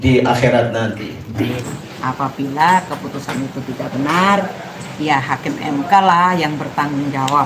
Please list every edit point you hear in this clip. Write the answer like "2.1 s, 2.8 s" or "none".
1.7 s